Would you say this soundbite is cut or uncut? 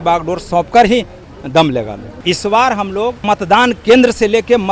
cut